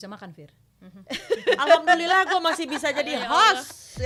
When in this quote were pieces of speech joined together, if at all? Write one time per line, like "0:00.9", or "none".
none